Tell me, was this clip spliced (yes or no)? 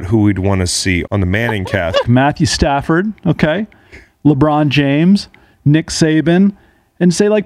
yes